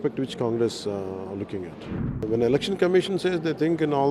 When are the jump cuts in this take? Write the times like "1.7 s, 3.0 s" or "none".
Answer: 2.2 s

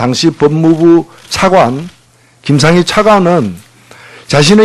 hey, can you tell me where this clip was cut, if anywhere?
0.9 s

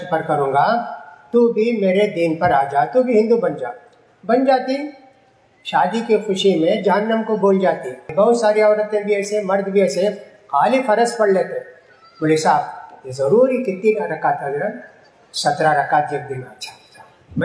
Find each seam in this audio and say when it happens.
8.0 s

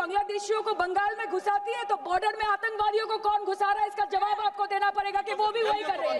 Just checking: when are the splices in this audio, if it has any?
none

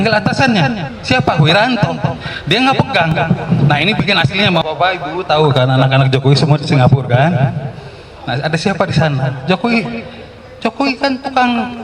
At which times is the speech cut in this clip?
4.6 s

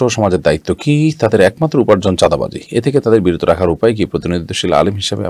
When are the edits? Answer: none

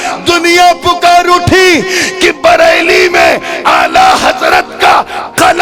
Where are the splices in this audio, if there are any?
none

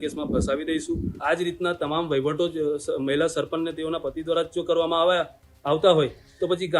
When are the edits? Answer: 1.1 s

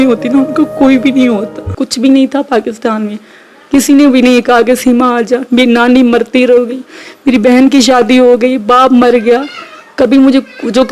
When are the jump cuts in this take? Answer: 1.7 s

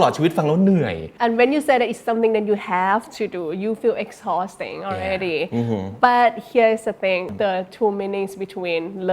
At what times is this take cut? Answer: 1.0 s, 7.3 s

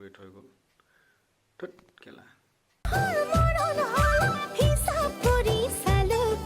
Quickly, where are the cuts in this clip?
2.9 s

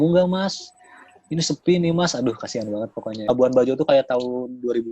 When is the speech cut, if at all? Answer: 3.3 s

